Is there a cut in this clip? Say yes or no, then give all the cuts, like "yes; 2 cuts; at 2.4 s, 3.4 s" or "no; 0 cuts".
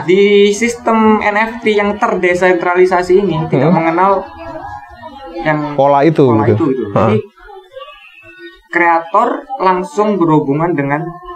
no; 0 cuts